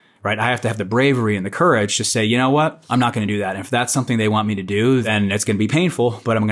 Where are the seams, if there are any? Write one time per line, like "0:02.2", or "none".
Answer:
0:02.8
0:05.1